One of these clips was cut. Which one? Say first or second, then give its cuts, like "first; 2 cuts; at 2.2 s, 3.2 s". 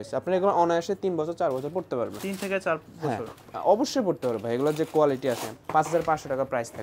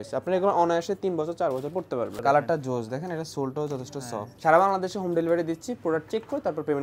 second; 2 cuts; at 2.1 s, 4.2 s